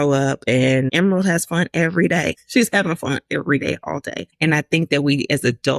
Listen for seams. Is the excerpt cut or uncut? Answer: cut